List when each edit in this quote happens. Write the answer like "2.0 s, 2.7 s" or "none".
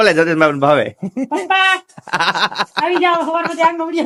none